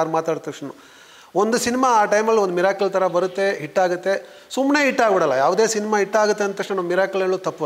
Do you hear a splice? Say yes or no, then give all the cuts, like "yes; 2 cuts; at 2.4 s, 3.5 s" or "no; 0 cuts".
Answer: no; 0 cuts